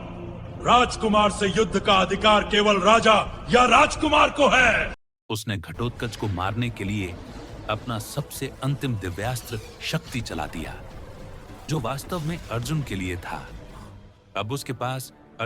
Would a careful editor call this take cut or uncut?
cut